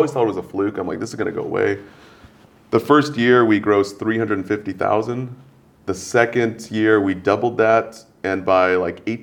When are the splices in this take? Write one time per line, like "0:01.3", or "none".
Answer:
none